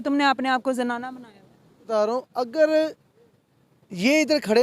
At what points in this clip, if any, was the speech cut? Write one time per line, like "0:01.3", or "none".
0:01.9